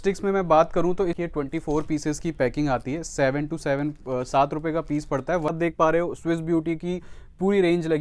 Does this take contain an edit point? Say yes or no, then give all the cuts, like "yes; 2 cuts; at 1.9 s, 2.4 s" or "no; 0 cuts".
yes; 2 cuts; at 1.2 s, 5.5 s